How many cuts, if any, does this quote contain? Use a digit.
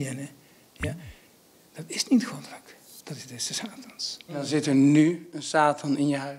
1